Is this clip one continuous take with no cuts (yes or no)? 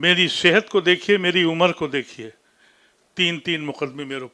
yes